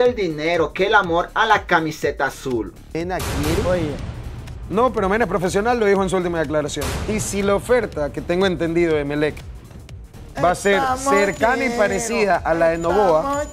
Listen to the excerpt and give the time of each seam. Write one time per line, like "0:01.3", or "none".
0:02.8